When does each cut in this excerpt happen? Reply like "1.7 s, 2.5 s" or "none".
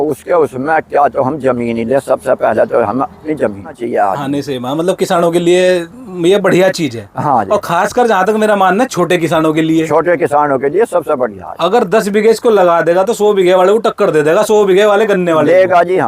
3.8 s